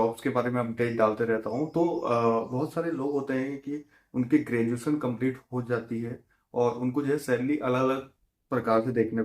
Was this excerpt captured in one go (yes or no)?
yes